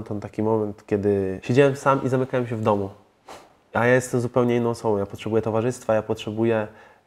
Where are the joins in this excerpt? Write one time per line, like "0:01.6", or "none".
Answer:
0:01.4